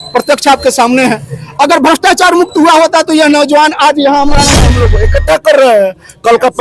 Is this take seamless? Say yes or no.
no